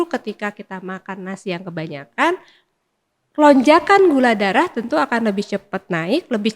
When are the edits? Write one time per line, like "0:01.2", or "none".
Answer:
none